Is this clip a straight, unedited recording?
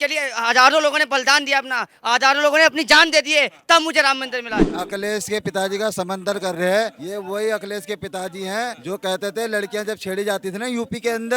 no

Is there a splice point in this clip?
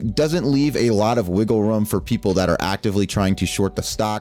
no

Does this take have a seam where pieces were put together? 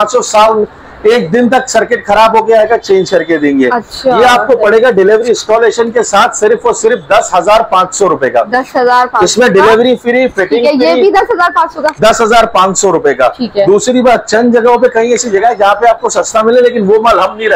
no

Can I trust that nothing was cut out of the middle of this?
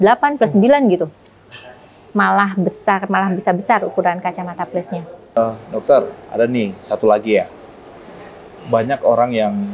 no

